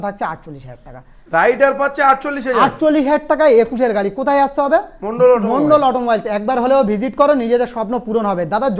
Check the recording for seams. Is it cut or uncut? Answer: uncut